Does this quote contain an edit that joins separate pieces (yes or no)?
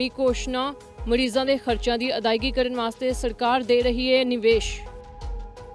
yes